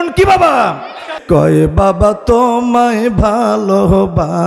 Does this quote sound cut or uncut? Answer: cut